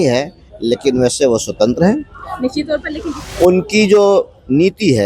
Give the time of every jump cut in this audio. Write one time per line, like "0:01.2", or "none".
0:02.9